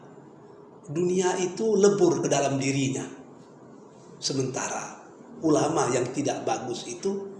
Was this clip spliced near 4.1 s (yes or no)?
no